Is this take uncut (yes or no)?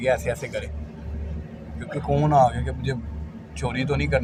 yes